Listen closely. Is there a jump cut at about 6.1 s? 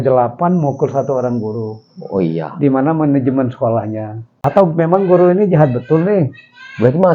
no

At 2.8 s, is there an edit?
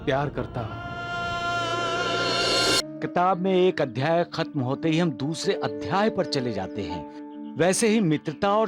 yes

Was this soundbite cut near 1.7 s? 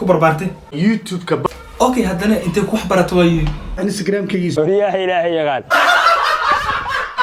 no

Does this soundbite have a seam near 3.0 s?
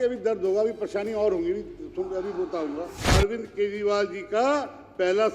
yes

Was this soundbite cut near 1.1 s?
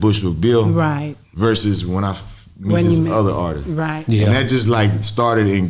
no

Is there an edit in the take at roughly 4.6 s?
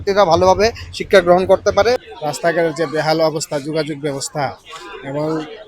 no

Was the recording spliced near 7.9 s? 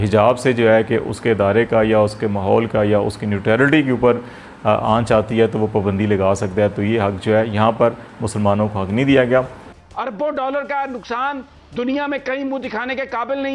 no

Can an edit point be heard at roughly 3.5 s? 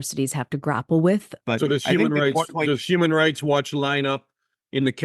no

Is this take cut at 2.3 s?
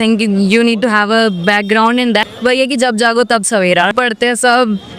yes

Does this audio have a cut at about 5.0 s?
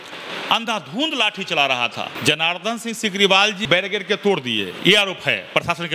no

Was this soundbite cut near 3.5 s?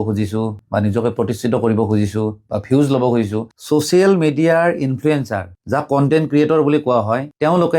yes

